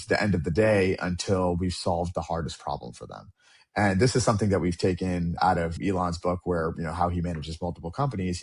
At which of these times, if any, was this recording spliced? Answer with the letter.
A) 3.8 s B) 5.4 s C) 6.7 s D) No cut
B